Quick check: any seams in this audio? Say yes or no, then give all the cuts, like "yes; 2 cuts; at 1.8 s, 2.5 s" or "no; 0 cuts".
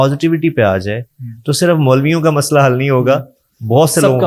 no; 0 cuts